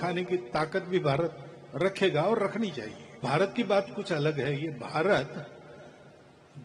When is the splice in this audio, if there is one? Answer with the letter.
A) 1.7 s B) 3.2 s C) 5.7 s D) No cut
B